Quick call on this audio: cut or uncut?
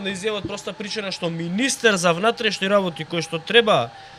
uncut